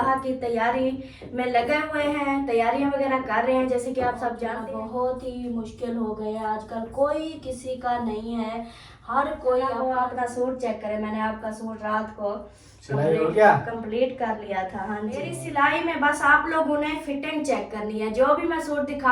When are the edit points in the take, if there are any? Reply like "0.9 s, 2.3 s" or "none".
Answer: 4.5 s, 9.9 s, 15.4 s